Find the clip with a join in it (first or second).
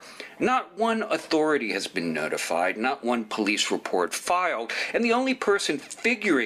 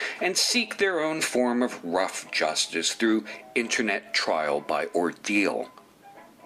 second